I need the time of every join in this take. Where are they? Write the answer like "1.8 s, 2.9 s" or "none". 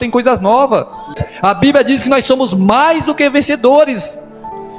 1.2 s